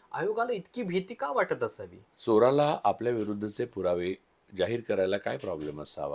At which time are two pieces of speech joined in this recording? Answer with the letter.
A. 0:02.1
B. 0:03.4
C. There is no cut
A